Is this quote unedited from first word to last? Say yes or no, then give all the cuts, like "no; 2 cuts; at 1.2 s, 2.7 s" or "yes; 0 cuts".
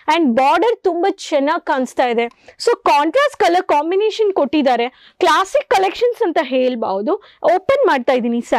yes; 0 cuts